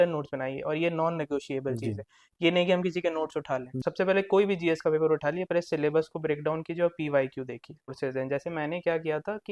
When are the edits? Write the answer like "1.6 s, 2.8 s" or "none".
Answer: 3.8 s, 8.0 s